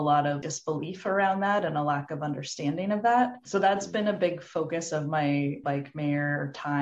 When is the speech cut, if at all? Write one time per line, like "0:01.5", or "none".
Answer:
none

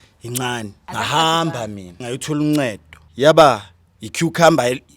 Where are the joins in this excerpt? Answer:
0:00.8
0:02.0
0:03.0

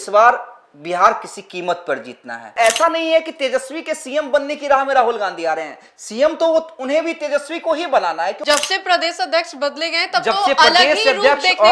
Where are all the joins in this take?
0:02.5
0:08.4

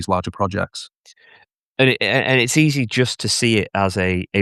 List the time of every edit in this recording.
none

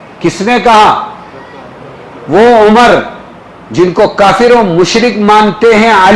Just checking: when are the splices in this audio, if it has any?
none

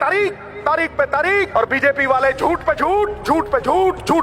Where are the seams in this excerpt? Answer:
0:01.5

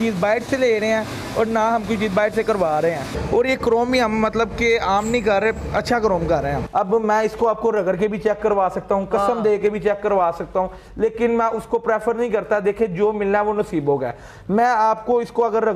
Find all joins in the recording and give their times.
0:03.1
0:06.6

